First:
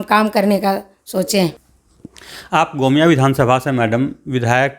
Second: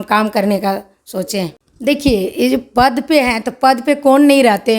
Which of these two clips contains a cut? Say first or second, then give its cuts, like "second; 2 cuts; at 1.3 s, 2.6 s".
second; 1 cut; at 1.6 s